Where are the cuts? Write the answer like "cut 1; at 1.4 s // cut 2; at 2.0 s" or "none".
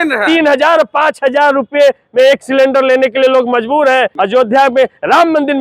cut 1; at 4.2 s